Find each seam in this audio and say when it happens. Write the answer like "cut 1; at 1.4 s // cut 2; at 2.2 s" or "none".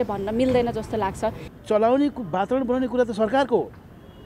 cut 1; at 1.5 s

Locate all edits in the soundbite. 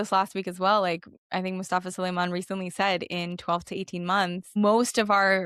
cut 1; at 1.1 s // cut 2; at 4.4 s

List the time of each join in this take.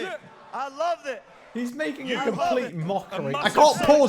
cut 1; at 1.3 s

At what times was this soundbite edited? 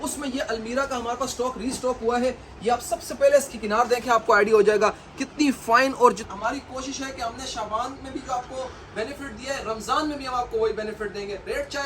cut 1; at 6.2 s

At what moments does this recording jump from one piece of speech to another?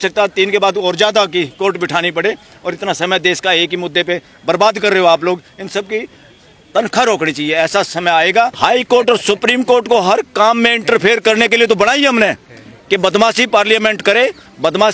cut 1; at 8.5 s

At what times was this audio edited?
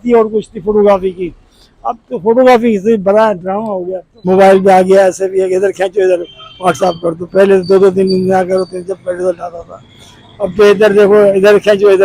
cut 1; at 4.2 s

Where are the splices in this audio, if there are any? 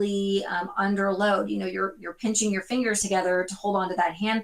cut 1; at 3.0 s

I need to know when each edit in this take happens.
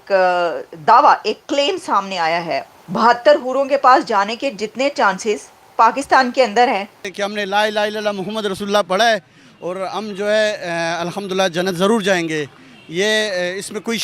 cut 1; at 2.6 s // cut 2; at 7.0 s

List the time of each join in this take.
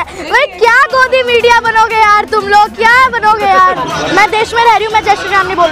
cut 1; at 3.8 s

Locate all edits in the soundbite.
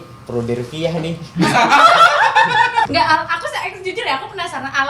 cut 1; at 2.9 s

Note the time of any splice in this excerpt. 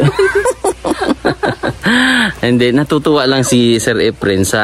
none

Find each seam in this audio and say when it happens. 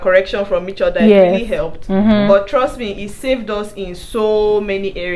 none

